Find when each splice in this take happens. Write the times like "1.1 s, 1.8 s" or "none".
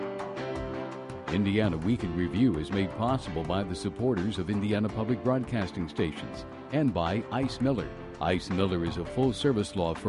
1.2 s